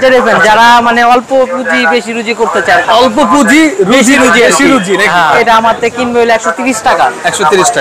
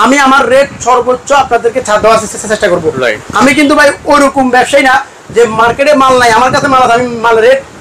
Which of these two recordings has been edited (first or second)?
first